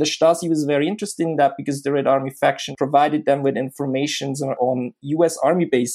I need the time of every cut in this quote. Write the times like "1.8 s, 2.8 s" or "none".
2.7 s, 4.6 s